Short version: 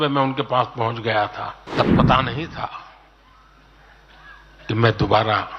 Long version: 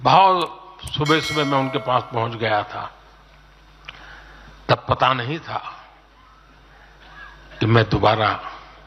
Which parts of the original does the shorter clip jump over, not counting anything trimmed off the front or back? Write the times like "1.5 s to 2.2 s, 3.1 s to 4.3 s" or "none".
3.0 s to 4.5 s